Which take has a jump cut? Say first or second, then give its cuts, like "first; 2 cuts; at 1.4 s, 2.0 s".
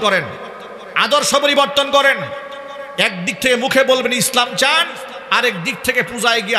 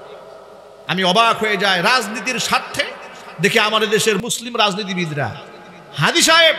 second; 1 cut; at 4.2 s